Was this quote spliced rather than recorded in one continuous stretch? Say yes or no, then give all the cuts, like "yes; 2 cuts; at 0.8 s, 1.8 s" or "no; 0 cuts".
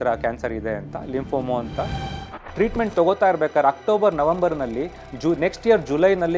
yes; 1 cut; at 2.1 s